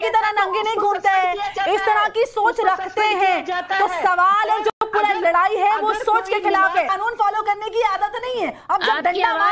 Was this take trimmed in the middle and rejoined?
yes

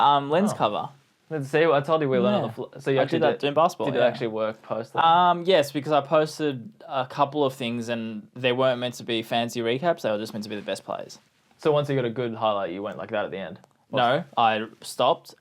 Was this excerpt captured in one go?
yes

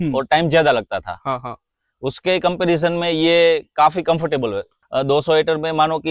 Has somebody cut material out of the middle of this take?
yes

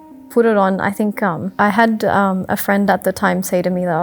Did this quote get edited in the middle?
yes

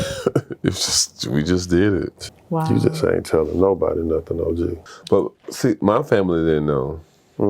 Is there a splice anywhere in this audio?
yes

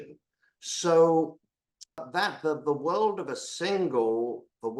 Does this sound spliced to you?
yes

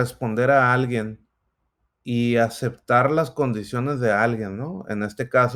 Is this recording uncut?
yes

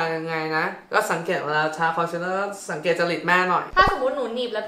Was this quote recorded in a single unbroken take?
no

